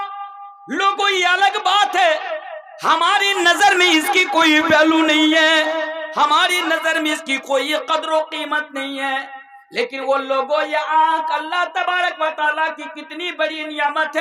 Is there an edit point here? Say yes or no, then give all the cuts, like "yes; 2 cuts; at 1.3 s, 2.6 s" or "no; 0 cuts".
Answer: no; 0 cuts